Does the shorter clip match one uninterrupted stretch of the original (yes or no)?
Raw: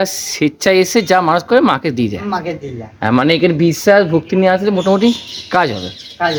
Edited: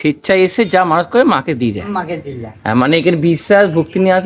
yes